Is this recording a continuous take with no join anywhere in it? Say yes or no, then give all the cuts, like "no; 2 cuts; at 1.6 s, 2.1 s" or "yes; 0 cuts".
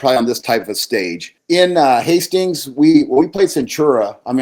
no; 1 cut; at 1.3 s